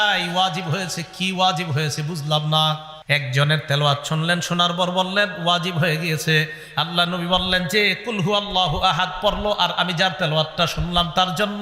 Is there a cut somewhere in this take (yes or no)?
yes